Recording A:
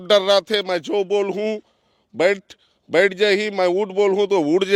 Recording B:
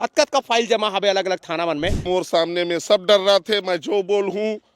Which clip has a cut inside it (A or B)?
B